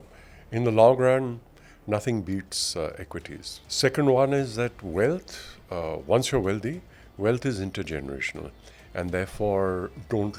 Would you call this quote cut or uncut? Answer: uncut